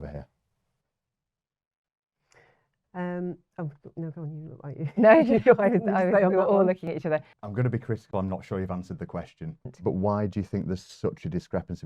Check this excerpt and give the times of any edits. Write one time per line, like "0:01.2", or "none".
0:07.3
0:09.7